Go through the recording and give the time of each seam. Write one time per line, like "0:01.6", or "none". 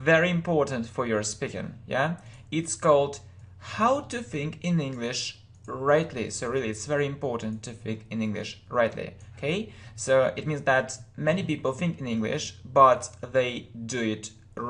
0:13.1